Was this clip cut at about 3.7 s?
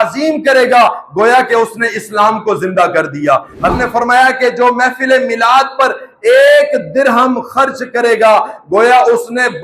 yes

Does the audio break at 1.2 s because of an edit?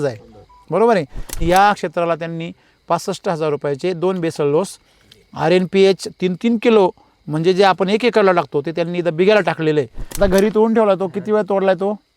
yes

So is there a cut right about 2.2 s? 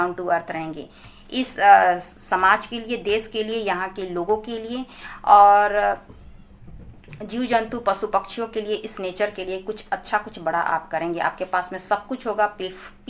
no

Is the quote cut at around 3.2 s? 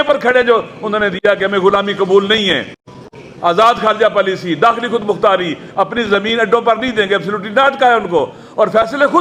no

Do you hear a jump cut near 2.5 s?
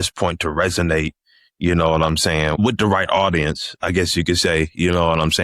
yes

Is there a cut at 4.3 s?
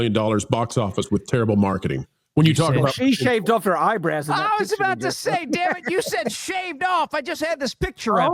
no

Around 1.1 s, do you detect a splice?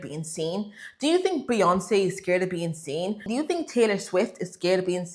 no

